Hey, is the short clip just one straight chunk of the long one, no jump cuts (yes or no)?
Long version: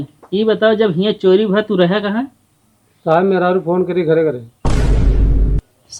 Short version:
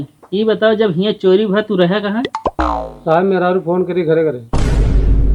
no